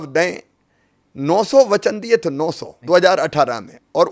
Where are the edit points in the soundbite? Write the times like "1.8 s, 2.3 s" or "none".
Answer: 2.7 s